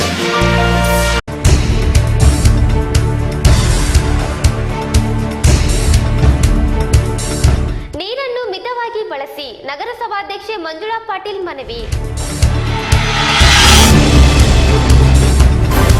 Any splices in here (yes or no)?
no